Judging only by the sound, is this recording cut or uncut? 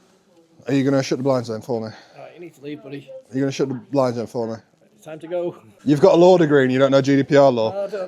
cut